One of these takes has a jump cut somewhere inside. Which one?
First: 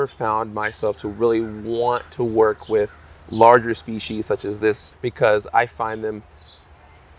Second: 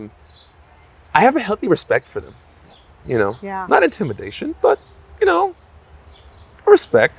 first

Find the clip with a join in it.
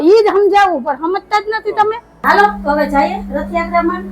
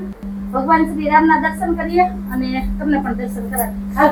first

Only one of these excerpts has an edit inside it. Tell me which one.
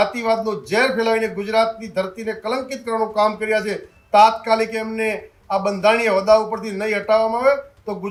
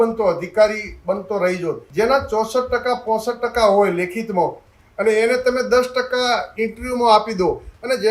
second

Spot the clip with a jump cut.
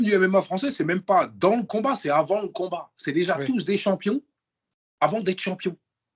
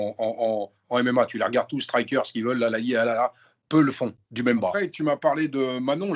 second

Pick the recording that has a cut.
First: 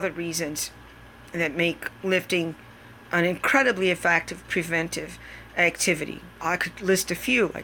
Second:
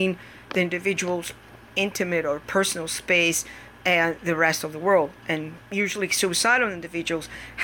first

